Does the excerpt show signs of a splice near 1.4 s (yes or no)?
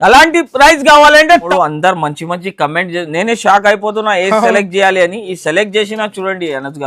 yes